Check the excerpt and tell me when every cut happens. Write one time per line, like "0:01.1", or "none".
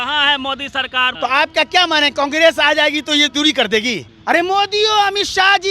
0:01.1
0:04.1